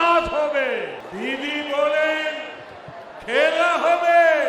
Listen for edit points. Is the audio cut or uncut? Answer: cut